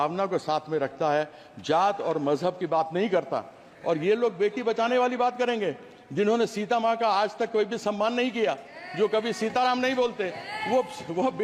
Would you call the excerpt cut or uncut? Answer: uncut